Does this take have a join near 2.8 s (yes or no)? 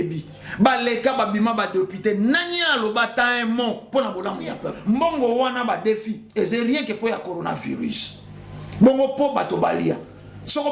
no